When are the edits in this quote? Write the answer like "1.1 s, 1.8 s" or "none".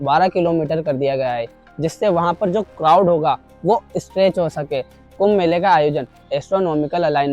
5.0 s